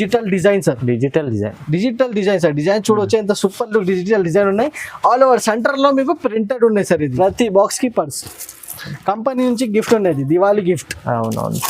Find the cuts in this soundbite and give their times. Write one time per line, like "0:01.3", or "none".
0:07.1

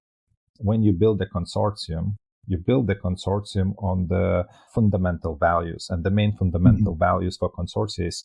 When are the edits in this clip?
0:04.7

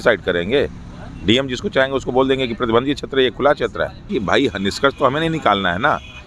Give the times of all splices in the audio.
0:04.0

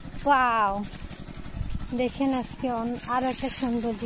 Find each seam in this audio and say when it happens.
none

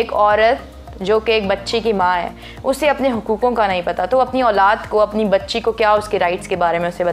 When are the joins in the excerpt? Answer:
none

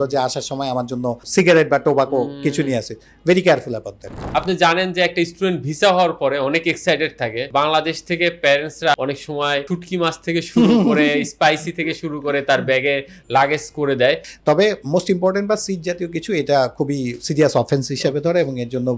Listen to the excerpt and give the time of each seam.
0:01.2
0:04.2
0:14.2

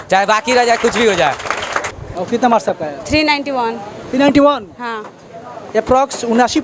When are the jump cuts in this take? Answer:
none

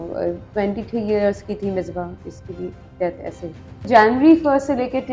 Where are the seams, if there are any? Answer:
0:03.7

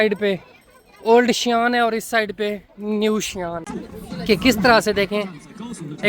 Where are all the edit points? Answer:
0:03.7

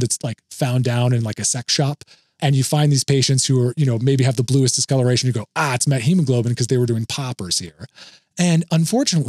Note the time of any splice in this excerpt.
0:02.4

